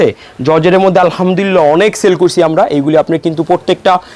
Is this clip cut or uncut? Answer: uncut